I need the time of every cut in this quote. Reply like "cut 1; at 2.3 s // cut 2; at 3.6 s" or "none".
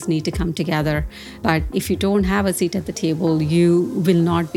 cut 1; at 1.7 s